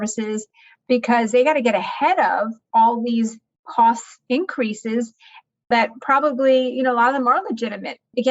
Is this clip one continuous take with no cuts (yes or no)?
yes